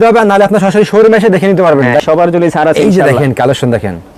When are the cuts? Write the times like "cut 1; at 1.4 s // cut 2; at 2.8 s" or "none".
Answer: cut 1; at 2.0 s

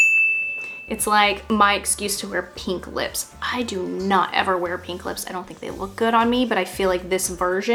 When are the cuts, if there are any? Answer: none

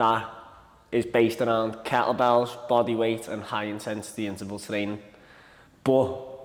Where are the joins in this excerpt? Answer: none

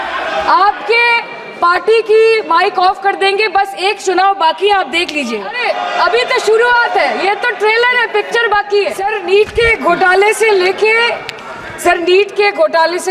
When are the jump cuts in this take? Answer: cut 1; at 5.6 s // cut 2; at 9.2 s

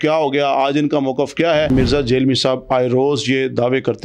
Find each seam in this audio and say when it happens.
cut 1; at 1.7 s

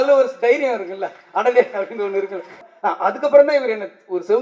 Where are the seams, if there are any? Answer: cut 1; at 2.5 s

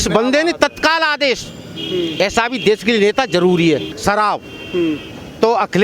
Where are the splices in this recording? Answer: cut 1; at 3.9 s

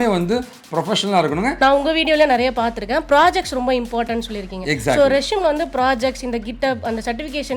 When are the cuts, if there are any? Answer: cut 1; at 1.6 s

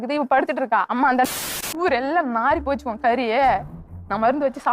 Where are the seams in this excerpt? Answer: cut 1; at 1.5 s

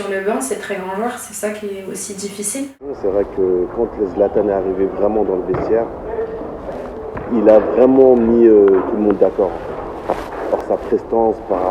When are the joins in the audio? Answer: cut 1; at 2.9 s

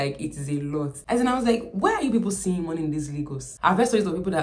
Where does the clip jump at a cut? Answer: cut 1; at 1.0 s // cut 2; at 3.4 s

